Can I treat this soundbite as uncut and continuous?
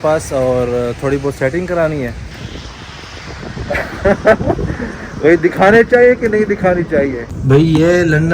no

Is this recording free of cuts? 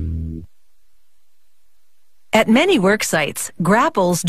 yes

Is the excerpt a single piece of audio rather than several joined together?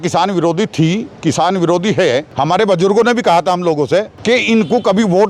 no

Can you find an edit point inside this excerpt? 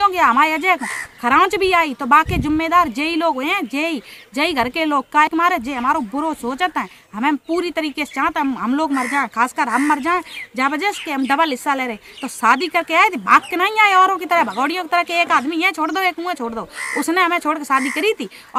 no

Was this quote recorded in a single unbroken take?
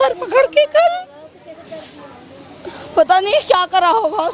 yes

